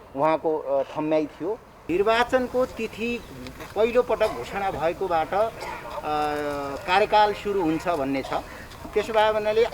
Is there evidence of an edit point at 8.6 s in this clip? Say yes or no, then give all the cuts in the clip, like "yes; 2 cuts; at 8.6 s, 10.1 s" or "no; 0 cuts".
no; 1 cut; at 1.7 s